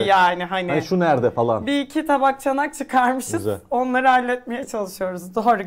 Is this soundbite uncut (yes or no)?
yes